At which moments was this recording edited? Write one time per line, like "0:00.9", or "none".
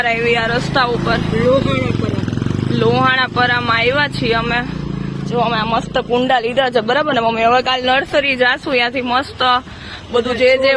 none